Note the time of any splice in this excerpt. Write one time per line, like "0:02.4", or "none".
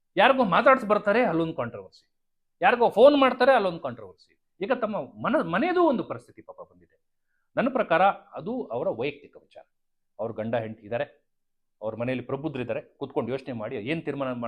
none

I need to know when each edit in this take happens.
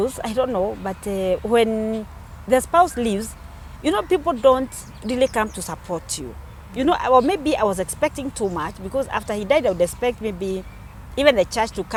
none

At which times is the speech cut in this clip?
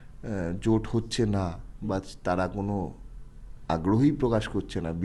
none

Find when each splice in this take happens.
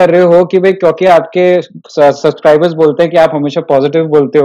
none

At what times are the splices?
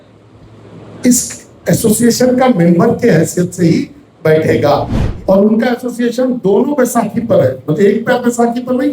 0:05.0

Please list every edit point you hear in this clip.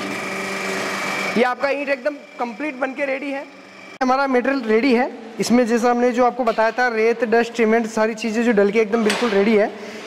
0:04.0

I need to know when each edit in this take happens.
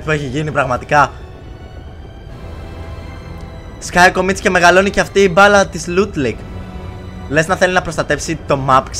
none

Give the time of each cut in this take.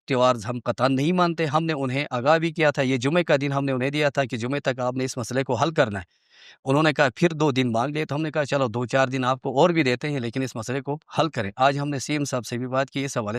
none

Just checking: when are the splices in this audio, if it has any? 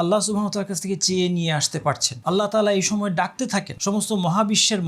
0:02.1
0:03.7

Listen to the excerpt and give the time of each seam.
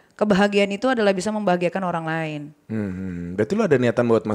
none

